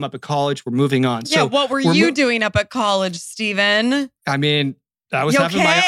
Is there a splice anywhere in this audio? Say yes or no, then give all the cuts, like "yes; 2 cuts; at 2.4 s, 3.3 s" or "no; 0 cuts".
yes; 1 cut; at 4.2 s